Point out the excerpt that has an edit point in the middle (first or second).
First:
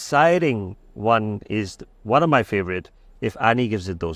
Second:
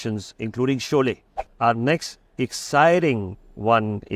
second